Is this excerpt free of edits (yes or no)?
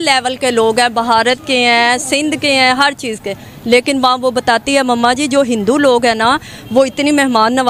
yes